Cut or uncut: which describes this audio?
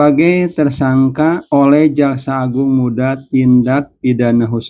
cut